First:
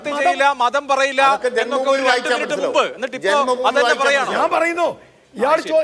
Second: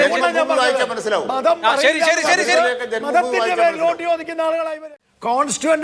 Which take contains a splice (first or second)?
second